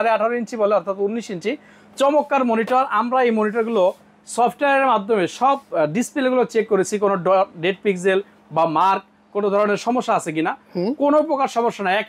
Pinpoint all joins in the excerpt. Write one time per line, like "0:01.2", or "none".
none

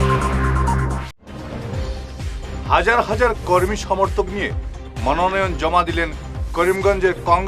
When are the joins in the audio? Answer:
0:02.1

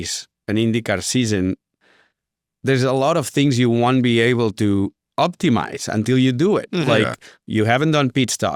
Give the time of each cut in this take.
none

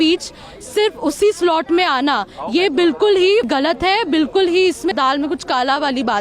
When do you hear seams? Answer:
0:03.5
0:04.9

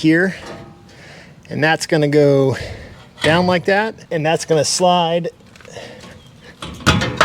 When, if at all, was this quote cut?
0:04.0

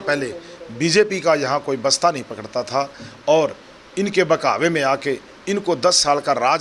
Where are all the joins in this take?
none

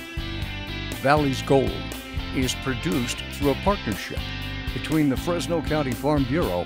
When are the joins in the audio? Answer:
0:01.0

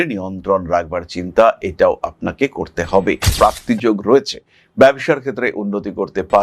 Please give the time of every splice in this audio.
0:03.3

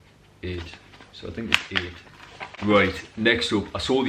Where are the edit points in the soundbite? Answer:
0:02.4

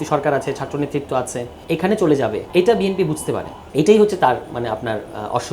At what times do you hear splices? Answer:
0:01.5
0:02.4
0:03.5

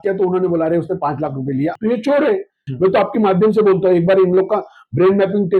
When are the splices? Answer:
0:01.8
0:02.7

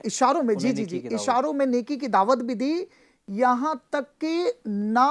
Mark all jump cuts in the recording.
none

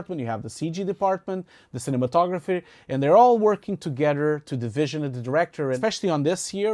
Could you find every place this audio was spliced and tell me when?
0:05.8

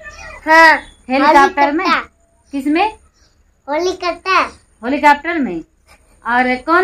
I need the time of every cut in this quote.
none

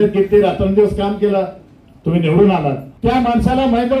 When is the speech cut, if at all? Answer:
0:02.8

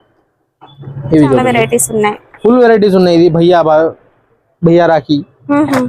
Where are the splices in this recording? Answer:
0:01.5

